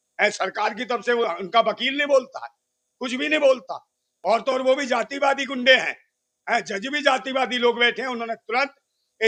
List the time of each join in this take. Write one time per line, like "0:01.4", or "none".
none